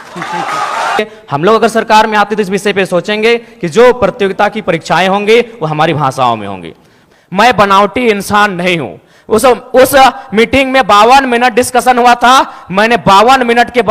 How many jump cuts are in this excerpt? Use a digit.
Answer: 2